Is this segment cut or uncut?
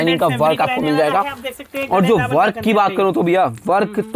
uncut